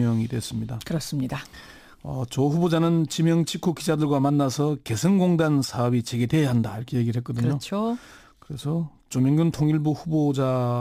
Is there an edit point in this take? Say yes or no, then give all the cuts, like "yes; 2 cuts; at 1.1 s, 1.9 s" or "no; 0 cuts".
no; 0 cuts